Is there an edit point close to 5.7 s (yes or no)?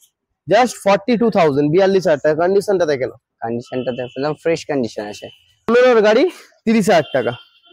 yes